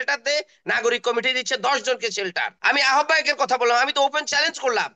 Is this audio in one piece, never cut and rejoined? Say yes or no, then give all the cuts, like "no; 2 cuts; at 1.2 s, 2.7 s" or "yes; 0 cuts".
no; 1 cut; at 2.5 s